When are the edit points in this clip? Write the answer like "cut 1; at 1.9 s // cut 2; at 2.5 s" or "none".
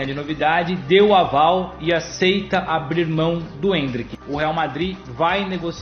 cut 1; at 4.1 s